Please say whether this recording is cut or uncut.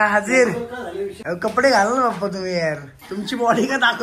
cut